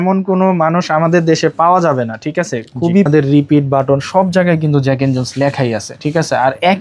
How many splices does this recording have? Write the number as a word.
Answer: one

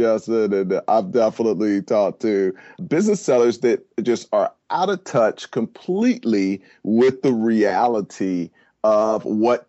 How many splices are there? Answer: zero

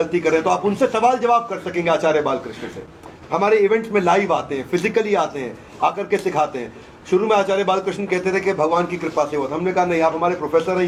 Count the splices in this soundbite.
zero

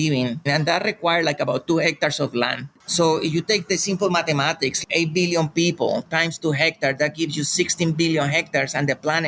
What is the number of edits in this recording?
two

